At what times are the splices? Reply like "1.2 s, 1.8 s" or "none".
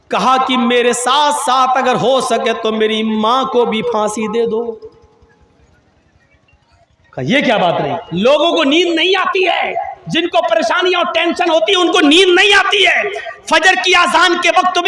8.0 s